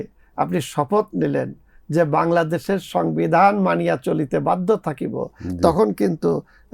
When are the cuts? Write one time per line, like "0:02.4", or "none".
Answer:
none